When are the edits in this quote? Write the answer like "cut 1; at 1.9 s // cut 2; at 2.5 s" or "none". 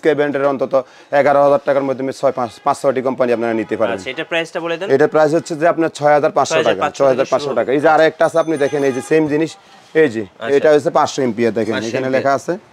none